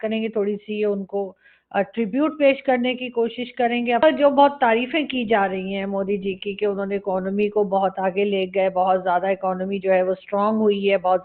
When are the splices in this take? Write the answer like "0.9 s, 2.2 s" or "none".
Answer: 4.0 s

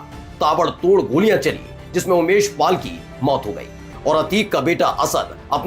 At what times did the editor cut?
3.8 s

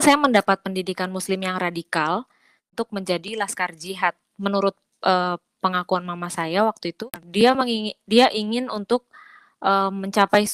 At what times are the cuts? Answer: 2.6 s, 7.0 s

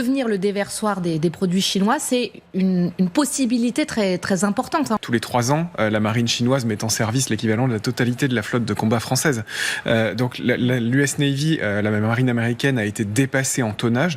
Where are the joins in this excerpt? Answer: 5.0 s

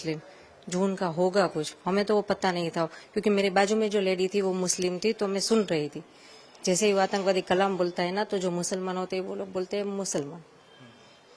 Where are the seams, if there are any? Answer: none

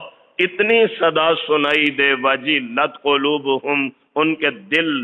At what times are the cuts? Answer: none

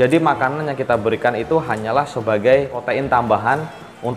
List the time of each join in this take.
2.8 s

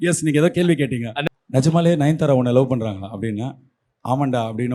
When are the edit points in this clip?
1.1 s

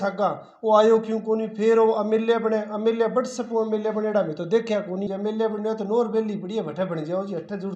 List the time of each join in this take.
5.1 s

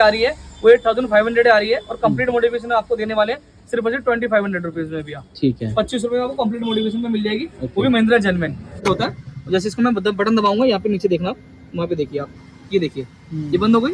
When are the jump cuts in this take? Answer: 8.8 s

